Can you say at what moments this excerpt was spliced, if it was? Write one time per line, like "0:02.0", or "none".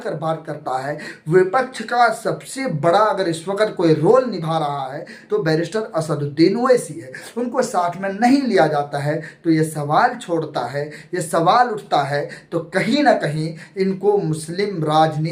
none